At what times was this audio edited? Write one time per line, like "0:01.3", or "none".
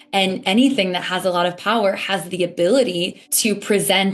0:03.2